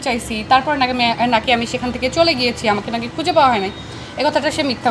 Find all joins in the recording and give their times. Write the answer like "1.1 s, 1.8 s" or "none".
none